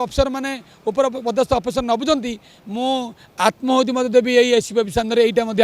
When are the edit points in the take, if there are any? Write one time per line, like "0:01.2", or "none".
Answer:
none